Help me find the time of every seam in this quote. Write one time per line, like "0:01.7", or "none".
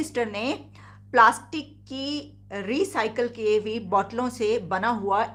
none